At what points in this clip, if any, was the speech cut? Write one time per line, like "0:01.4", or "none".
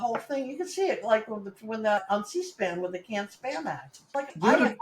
0:02.0
0:03.9